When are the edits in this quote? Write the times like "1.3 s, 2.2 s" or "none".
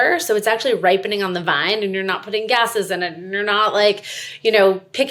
none